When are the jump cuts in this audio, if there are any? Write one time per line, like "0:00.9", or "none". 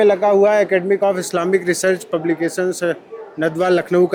none